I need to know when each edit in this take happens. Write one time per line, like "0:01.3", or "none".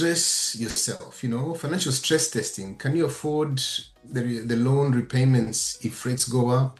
none